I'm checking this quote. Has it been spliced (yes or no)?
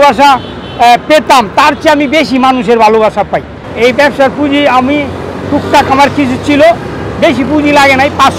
yes